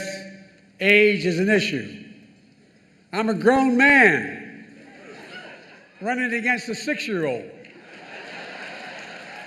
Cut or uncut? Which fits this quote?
uncut